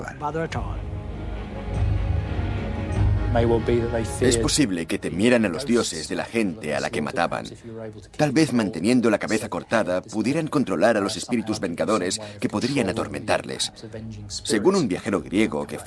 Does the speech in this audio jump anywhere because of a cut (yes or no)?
yes